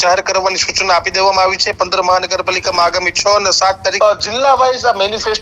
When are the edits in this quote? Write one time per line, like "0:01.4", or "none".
0:03.9